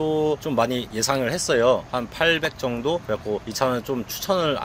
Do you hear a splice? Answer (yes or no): no